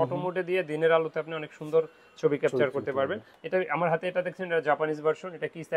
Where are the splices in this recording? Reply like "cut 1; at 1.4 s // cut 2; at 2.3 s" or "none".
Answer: cut 1; at 3.3 s